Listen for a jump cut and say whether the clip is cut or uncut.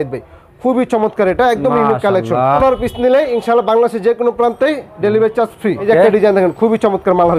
cut